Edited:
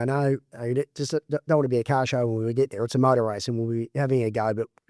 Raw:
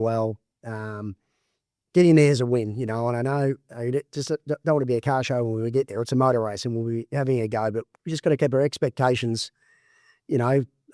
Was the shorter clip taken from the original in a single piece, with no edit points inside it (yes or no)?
yes